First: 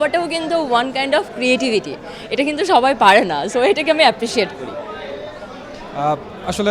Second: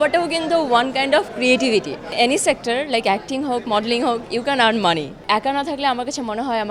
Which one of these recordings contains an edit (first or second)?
second